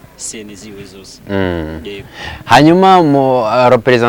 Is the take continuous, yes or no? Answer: yes